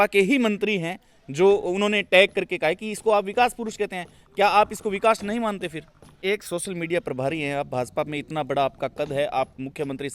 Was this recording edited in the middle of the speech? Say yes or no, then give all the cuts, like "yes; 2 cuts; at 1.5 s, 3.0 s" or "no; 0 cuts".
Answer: yes; 1 cut; at 6.1 s